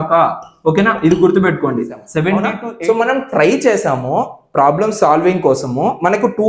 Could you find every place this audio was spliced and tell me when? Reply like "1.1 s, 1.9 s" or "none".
2.6 s